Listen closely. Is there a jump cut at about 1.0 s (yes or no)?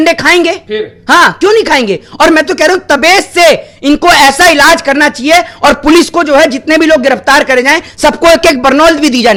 no